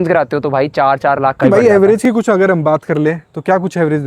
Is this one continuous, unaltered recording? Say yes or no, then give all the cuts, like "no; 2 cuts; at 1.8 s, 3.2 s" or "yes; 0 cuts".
no; 1 cut; at 1.4 s